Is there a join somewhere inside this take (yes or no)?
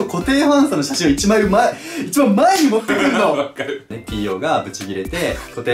yes